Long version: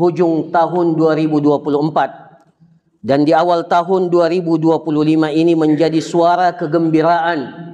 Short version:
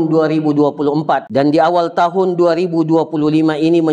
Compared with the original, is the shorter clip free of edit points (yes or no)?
no